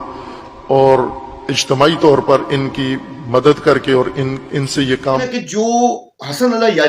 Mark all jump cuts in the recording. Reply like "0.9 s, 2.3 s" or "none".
5.3 s